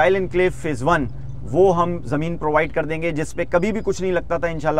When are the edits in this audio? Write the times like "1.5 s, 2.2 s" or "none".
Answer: none